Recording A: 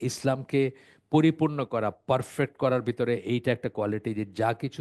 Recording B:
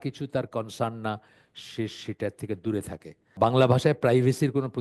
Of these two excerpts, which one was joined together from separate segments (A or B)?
B